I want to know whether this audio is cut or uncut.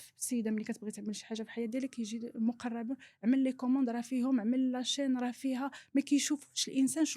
uncut